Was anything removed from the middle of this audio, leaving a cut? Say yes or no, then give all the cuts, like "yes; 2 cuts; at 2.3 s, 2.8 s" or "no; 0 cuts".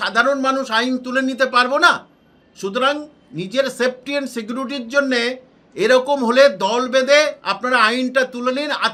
no; 0 cuts